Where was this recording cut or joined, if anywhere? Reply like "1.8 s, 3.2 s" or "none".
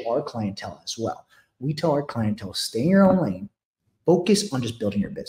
none